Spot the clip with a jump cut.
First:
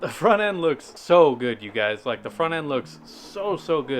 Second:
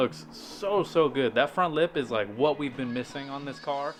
first; 1 cut; at 0.9 s

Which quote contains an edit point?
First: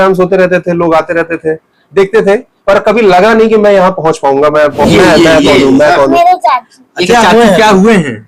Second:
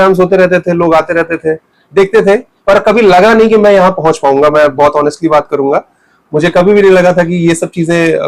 first; 1 cut; at 4.8 s

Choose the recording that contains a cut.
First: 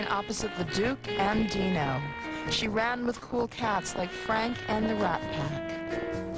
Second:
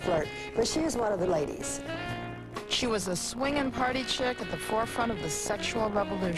second; 1 cut; at 5.3 s

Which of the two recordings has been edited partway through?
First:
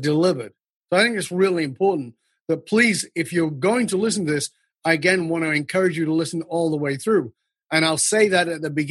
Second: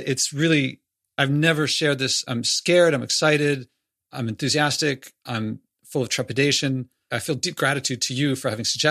second; 3 cuts; at 2.3 s, 5.7 s, 7.1 s

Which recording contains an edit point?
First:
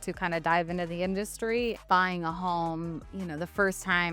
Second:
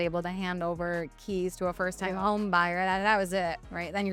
first; 1 cut; at 1.8 s

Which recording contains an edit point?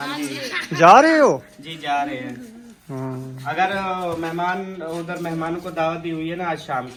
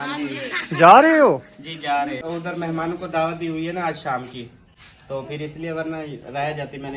second; 1 cut; at 2.2 s

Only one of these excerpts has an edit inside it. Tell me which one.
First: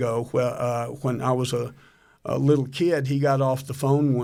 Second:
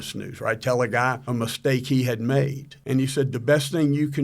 second; 2 cuts; at 1.2 s, 2.7 s

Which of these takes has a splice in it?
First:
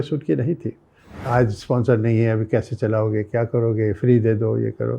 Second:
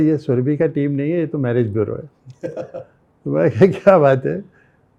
first; 1 cut; at 1.2 s

